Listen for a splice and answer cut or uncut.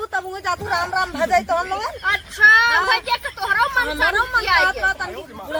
uncut